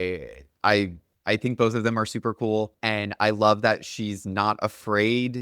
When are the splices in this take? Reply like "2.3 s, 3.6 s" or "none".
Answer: 1.1 s, 2.8 s